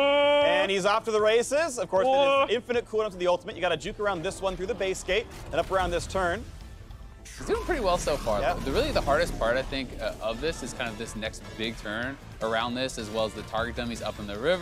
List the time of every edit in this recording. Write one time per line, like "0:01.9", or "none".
none